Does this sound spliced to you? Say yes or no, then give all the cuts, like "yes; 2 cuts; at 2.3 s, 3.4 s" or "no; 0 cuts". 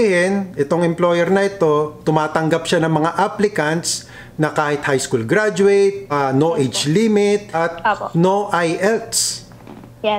yes; 2 cuts; at 6.1 s, 7.5 s